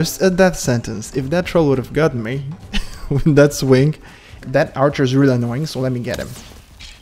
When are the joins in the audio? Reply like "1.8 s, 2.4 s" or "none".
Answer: 4.4 s